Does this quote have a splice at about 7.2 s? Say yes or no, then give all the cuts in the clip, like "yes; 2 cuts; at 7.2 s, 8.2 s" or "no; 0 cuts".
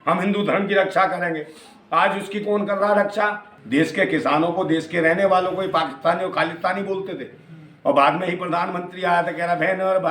no; 1 cut; at 3.5 s